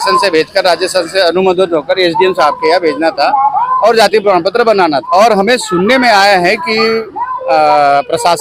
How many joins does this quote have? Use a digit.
1